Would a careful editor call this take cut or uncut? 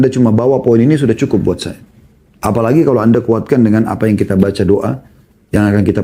uncut